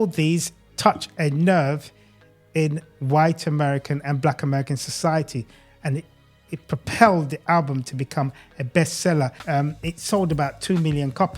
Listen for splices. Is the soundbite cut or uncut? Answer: cut